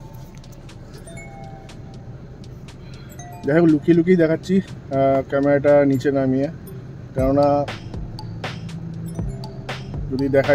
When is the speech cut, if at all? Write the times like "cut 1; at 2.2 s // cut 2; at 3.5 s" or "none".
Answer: none